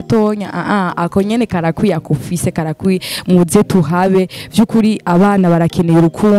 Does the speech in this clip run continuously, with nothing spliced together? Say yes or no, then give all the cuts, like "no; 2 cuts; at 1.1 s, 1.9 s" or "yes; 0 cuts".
yes; 0 cuts